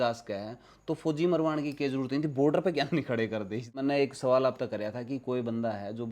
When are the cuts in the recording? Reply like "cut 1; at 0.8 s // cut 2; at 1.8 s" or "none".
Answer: cut 1; at 3.8 s